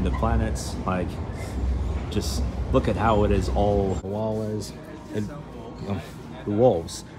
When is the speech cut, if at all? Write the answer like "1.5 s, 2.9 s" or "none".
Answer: 4.0 s